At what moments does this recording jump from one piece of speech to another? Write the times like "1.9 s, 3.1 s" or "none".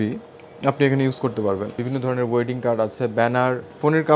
1.8 s, 3.1 s